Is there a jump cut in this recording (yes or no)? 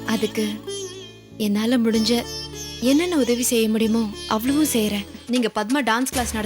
yes